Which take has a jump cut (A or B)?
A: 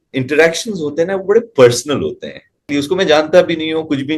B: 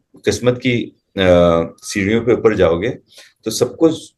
A